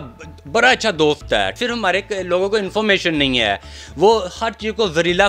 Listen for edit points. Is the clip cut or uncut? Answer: cut